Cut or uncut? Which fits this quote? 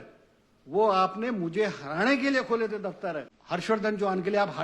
cut